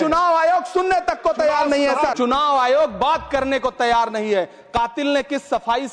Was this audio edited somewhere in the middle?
yes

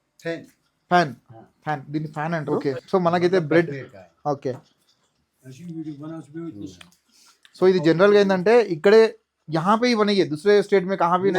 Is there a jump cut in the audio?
yes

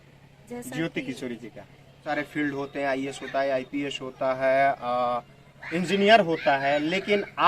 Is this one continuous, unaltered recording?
no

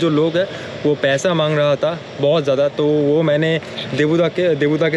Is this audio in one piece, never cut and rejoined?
yes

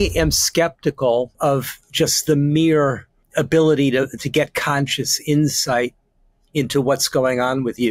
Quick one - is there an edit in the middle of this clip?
yes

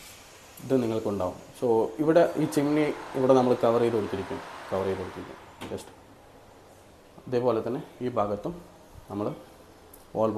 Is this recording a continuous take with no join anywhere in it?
yes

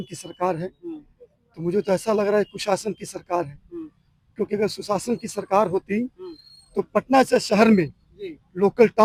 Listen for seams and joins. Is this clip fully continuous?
yes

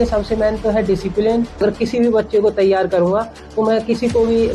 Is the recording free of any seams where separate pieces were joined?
no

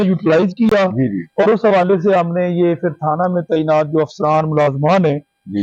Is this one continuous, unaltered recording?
yes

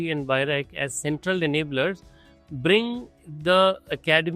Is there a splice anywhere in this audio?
no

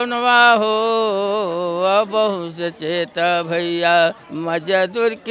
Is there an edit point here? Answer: yes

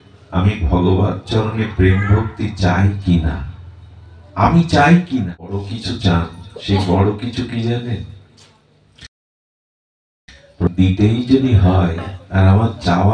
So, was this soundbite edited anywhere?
yes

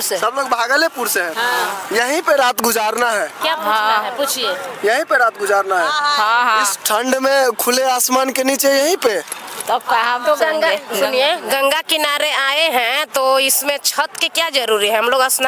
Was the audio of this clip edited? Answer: no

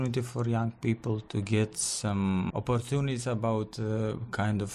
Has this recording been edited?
yes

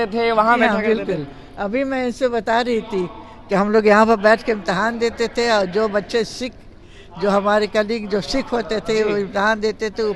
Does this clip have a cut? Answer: no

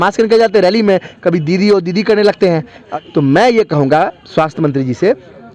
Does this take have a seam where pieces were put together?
yes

